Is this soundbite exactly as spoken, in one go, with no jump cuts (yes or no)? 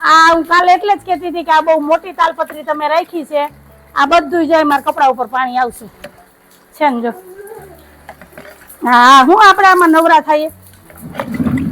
yes